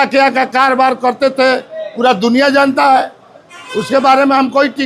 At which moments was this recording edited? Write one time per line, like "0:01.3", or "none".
none